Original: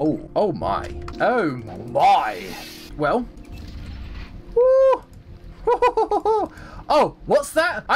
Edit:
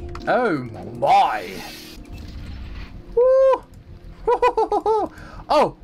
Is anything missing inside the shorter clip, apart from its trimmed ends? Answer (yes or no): yes